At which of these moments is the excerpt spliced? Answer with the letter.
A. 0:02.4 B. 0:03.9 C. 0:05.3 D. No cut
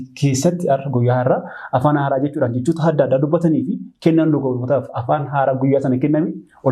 D